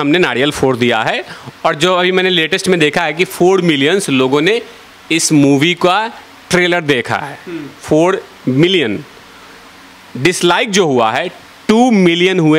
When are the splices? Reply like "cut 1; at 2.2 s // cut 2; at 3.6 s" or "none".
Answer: none